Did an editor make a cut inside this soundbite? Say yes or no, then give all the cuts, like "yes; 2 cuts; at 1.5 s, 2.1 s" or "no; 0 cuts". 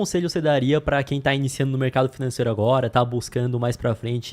no; 0 cuts